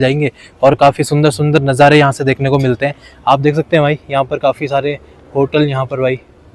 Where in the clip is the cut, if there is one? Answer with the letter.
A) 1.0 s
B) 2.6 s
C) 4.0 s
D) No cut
D